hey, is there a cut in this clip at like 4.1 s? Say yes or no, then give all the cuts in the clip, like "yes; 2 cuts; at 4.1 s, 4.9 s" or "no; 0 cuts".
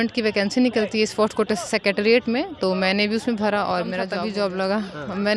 yes; 1 cut; at 4.1 s